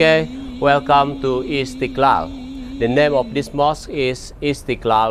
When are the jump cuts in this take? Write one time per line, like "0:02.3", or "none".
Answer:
none